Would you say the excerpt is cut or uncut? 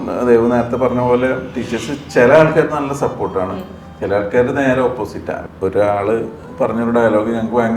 cut